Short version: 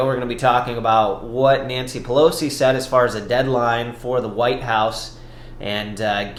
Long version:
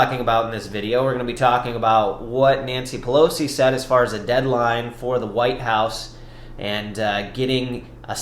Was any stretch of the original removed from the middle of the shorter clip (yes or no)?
no